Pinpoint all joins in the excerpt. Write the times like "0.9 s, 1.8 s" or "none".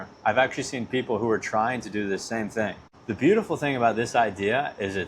2.9 s